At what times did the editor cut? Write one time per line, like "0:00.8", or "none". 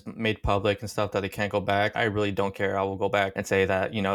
none